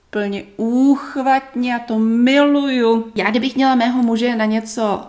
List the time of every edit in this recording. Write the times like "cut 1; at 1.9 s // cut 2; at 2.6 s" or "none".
cut 1; at 3.1 s